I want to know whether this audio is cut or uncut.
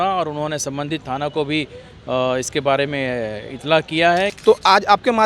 cut